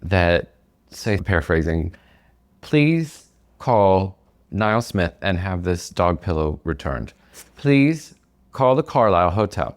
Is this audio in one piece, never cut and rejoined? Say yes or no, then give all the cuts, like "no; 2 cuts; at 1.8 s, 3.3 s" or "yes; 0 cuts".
no; 1 cut; at 1.2 s